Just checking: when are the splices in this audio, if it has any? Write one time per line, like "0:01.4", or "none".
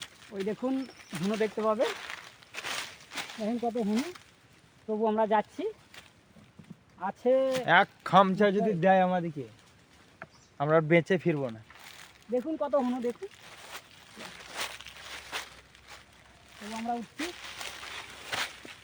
none